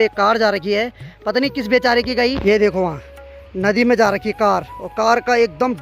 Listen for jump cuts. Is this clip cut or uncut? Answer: cut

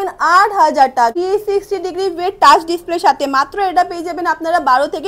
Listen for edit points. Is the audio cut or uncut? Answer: cut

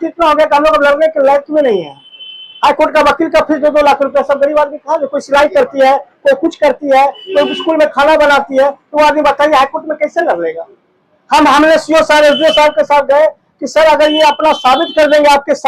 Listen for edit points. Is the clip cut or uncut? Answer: uncut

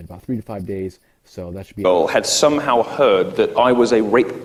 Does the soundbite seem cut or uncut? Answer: uncut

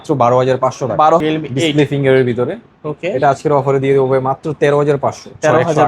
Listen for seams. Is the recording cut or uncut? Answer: cut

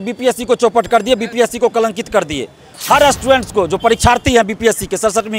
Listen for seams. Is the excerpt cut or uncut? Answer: cut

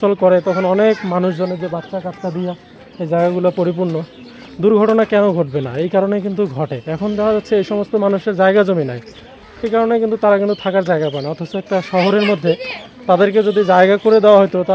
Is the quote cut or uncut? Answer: uncut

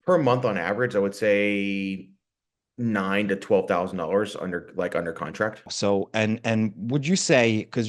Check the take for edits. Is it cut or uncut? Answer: uncut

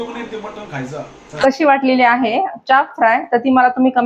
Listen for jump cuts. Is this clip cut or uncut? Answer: cut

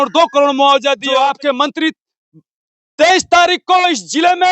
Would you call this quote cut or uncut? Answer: cut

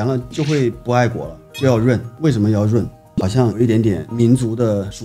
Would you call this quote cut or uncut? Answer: uncut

